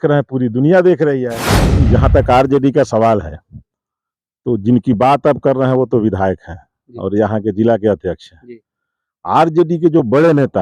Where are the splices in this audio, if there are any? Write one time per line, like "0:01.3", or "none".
0:01.6